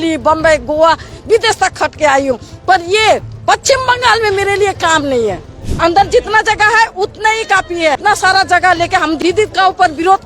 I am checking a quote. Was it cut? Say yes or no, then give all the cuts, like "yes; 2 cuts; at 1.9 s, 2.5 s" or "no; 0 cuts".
yes; 3 cuts; at 5.6 s, 8.0 s, 9.2 s